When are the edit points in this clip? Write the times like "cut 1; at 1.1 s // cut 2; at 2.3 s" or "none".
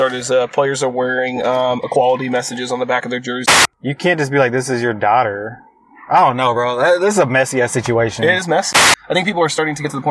cut 1; at 3.6 s // cut 2; at 8.9 s